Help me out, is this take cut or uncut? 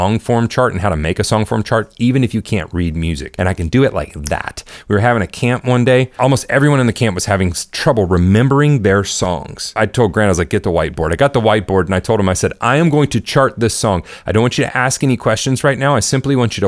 cut